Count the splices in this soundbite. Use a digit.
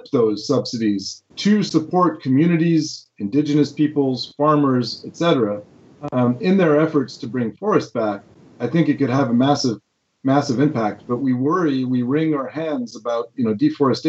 1